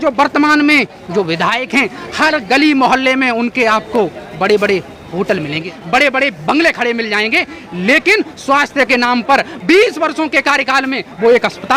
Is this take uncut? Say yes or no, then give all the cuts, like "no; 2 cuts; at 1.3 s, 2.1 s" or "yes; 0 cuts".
no; 2 cuts; at 1.0 s, 5.7 s